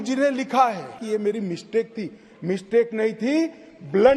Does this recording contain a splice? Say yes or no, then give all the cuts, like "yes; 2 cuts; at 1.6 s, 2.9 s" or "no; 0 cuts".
yes; 1 cut; at 1.0 s